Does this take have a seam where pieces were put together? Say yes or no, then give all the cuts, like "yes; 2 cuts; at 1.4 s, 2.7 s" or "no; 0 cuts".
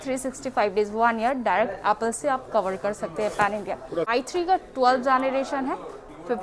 yes; 1 cut; at 4.1 s